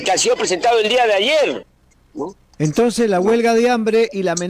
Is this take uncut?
no; 1 cut; at 2.5 s

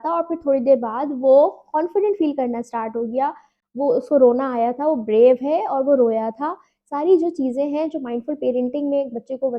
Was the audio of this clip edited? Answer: no; 0 cuts

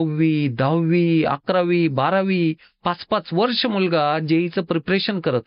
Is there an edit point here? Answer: no; 0 cuts

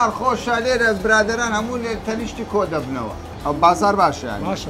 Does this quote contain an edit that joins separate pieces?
yes; 1 cut; at 3.3 s

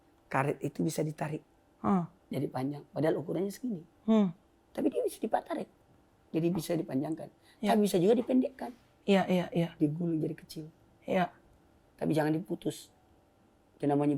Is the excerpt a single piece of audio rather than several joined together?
yes; 0 cuts

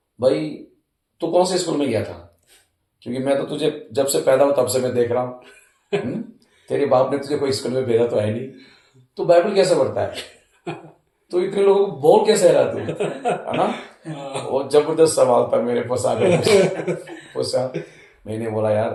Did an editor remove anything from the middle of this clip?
no; 0 cuts

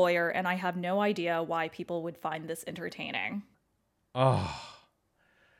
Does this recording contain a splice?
no; 0 cuts

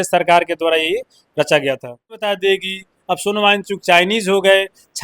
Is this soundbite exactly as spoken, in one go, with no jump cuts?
no; 1 cut; at 2.3 s

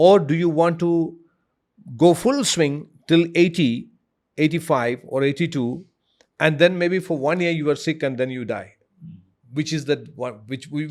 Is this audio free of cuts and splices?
yes; 0 cuts

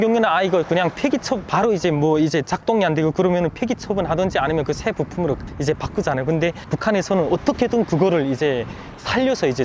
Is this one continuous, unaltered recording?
yes; 0 cuts

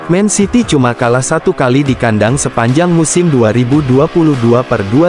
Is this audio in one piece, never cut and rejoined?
yes; 0 cuts

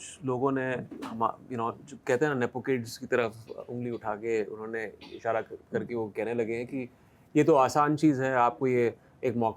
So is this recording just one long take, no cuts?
yes; 0 cuts

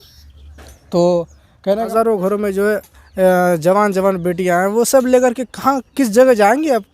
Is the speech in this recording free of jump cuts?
no; 1 cut; at 1.9 s

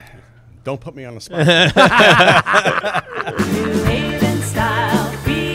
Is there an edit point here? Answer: yes; 1 cut; at 3.3 s

